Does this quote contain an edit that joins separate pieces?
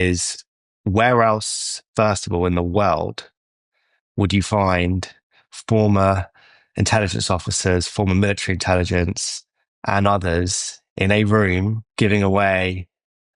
yes; 1 cut; at 11.8 s

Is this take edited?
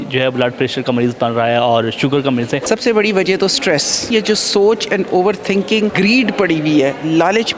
yes; 3 cuts; at 2.6 s, 4.1 s, 5.9 s

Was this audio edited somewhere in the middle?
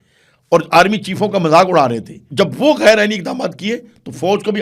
yes; 1 cut; at 2.2 s

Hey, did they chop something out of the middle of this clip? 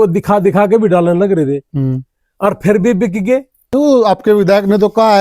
yes; 1 cut; at 3.6 s

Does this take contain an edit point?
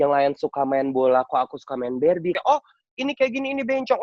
yes; 1 cut; at 2.4 s

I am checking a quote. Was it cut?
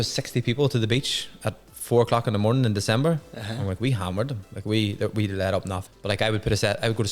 yes; 1 cut; at 5.7 s

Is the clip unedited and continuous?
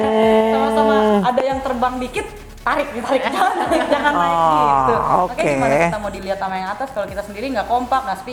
yes; 0 cuts

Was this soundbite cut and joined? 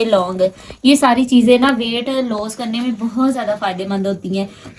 no; 0 cuts

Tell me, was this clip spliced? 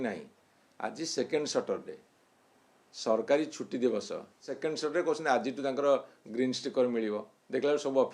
yes; 1 cut; at 4.5 s

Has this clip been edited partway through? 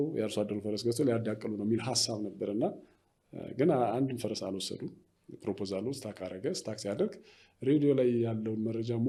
no; 0 cuts

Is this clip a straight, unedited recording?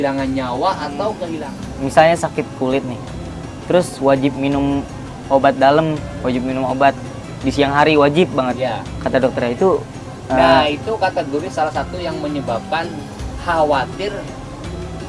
no; 1 cut; at 1.3 s

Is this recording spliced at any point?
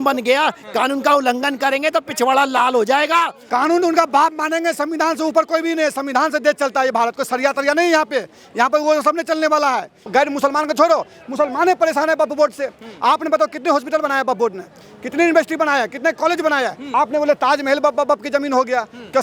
yes; 3 cuts; at 3.4 s, 10.0 s, 16.8 s

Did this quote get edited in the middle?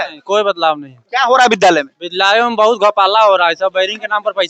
no; 0 cuts

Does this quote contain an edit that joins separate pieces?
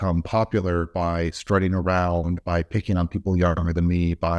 no; 0 cuts

